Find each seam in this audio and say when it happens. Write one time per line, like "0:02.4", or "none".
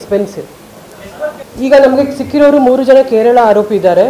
0:01.4